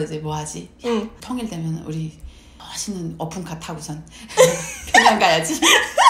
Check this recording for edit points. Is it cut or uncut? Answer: uncut